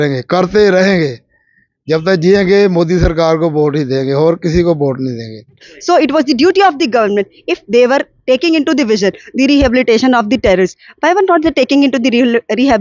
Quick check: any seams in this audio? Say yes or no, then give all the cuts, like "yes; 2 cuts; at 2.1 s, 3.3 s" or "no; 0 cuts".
yes; 1 cut; at 5.7 s